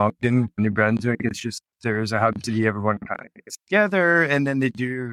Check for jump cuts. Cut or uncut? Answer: uncut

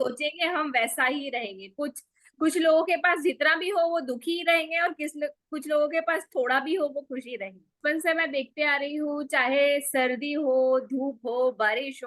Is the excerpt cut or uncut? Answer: cut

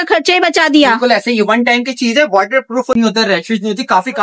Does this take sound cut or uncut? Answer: cut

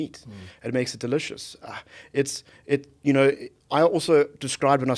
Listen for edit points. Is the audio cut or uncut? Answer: uncut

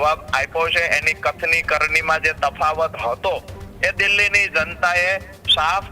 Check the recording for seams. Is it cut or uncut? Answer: uncut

